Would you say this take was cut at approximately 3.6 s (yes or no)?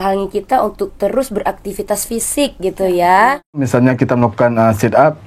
yes